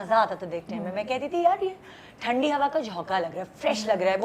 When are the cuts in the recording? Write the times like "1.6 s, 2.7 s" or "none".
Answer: none